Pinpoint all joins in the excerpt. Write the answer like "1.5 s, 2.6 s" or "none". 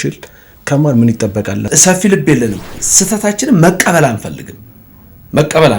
1.7 s, 2.8 s